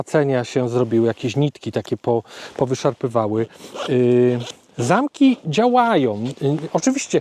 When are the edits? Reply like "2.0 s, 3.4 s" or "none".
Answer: none